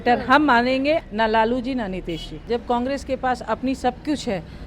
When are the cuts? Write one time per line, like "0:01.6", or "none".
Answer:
0:01.1
0:02.4